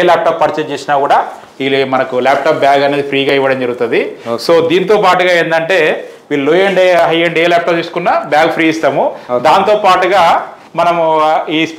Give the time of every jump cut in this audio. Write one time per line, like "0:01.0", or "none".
none